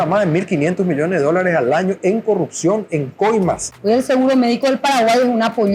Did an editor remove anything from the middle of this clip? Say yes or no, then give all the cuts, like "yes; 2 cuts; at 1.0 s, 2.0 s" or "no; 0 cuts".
yes; 1 cut; at 3.7 s